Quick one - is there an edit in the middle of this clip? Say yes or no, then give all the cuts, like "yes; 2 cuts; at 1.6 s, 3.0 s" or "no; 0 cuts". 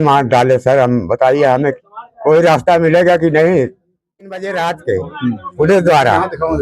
yes; 1 cut; at 4.4 s